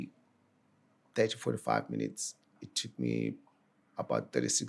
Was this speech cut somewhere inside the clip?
yes; 1 cut; at 2.6 s

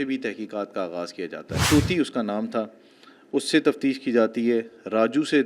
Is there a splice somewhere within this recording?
yes; 1 cut; at 1.6 s

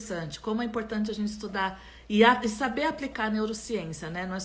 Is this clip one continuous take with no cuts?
yes; 0 cuts

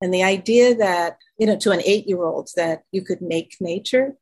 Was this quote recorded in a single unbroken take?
no; 1 cut; at 1.2 s

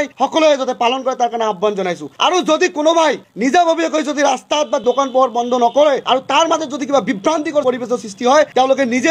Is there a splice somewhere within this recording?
no; 0 cuts

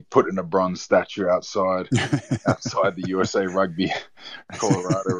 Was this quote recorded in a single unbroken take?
yes; 0 cuts

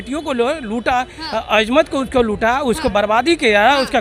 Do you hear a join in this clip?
no; 0 cuts

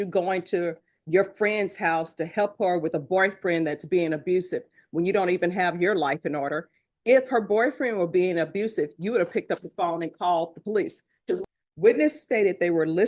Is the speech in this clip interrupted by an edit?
yes; 1 cut; at 11.4 s

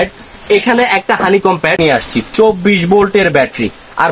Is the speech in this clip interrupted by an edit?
yes; 1 cut; at 1.8 s

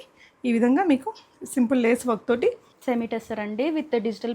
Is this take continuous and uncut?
no; 1 cut; at 2.7 s

